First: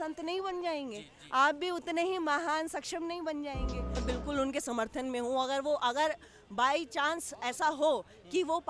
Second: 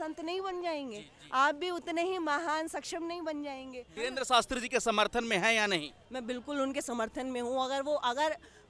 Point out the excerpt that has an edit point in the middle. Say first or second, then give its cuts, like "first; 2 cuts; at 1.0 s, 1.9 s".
first; 1 cut; at 3.8 s